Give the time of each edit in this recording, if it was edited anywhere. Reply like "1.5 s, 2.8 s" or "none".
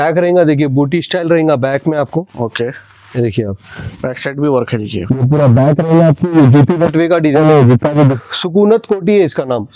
8.0 s